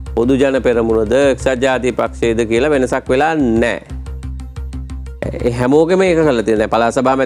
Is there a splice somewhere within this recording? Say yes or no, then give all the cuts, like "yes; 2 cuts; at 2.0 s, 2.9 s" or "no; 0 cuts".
no; 0 cuts